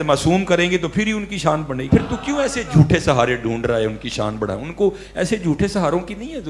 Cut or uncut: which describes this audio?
cut